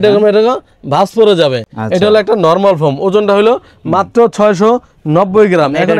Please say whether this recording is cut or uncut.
uncut